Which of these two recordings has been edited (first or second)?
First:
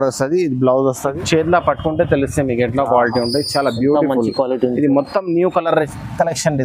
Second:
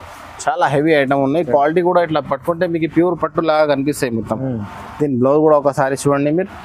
first